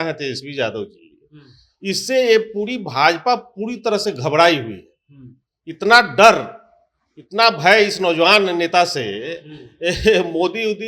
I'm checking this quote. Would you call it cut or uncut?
uncut